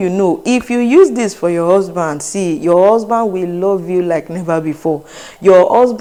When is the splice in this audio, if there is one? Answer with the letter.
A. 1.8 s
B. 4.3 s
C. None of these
C